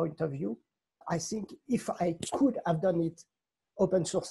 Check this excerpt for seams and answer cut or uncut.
cut